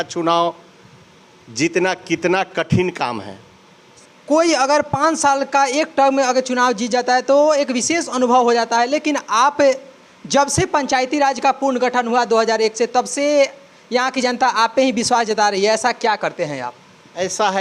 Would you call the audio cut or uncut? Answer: uncut